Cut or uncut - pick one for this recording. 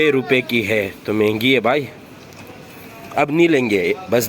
uncut